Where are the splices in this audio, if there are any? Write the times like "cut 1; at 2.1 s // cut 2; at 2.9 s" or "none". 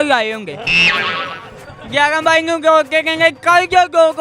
none